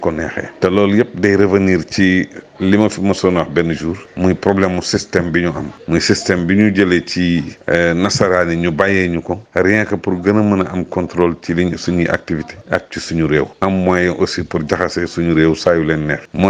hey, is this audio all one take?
yes; 0 cuts

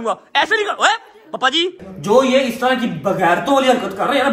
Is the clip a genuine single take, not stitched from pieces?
no; 1 cut; at 1.9 s

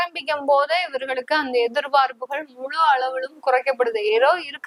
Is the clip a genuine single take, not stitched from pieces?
yes; 0 cuts

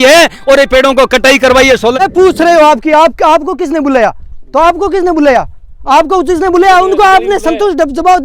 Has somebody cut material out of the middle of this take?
yes; 1 cut; at 2.0 s

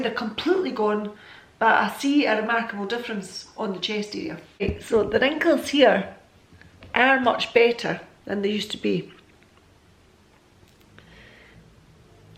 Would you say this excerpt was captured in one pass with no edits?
yes; 0 cuts

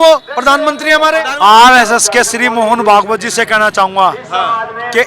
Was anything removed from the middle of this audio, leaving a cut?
yes; 1 cut; at 1.2 s

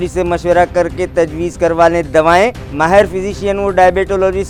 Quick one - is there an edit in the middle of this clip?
no; 0 cuts

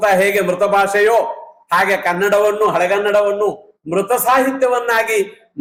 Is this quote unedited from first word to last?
yes; 0 cuts

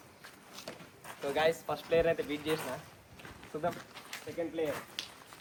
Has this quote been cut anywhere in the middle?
no; 0 cuts

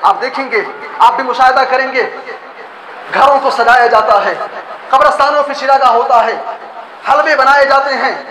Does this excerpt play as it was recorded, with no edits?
yes; 0 cuts

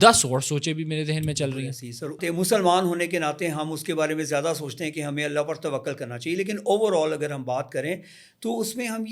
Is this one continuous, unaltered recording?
no; 1 cut; at 2.2 s

